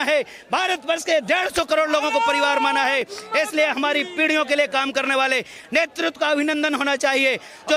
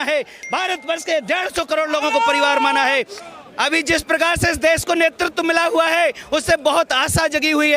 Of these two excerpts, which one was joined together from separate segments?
second; 1 cut; at 3.2 s

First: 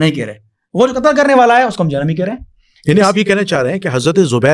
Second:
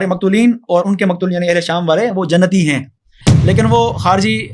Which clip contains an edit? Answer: second; 1 cut; at 3.2 s

